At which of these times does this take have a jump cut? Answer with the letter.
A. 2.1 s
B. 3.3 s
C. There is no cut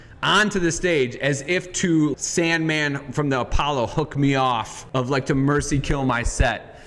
A